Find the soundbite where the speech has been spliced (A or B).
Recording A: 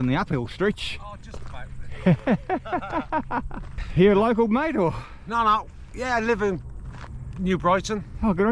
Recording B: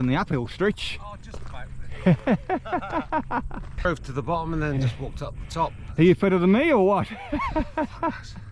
B